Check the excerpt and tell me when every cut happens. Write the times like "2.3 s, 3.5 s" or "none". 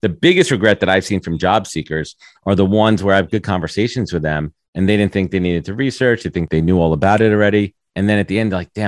6.5 s, 7.8 s